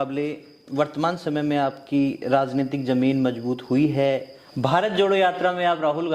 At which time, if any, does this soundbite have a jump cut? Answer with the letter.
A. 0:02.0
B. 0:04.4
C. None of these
B